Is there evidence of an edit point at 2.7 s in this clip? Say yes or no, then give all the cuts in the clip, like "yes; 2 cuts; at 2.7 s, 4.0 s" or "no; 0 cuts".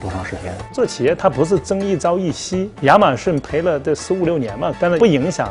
yes; 2 cuts; at 2.7 s, 3.4 s